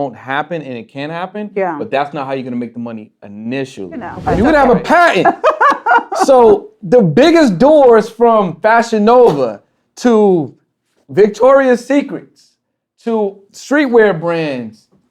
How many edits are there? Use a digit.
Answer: 1